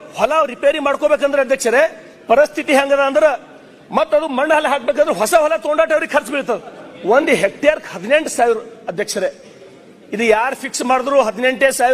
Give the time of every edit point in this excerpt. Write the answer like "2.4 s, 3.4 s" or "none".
6.9 s